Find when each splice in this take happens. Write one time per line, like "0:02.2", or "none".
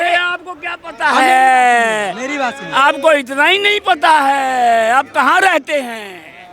none